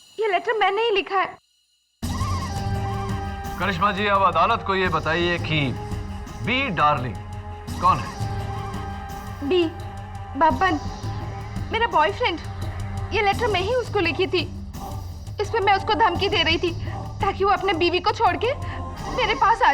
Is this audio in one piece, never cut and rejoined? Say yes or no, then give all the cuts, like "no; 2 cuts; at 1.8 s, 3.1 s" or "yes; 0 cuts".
no; 1 cut; at 1.3 s